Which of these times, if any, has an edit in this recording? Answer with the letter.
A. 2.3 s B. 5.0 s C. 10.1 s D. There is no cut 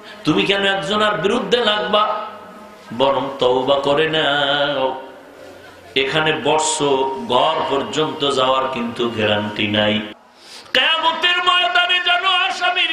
C